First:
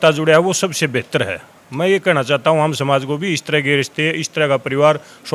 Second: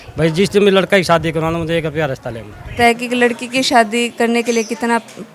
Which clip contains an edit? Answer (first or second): second